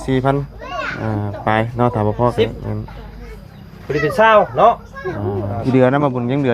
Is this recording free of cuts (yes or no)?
no